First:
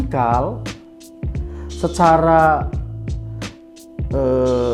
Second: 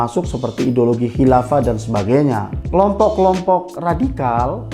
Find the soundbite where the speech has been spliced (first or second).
second